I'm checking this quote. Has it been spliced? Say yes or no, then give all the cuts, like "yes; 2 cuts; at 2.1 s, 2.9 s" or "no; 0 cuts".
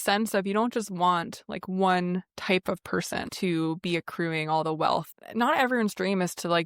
yes; 2 cuts; at 3.3 s, 5.1 s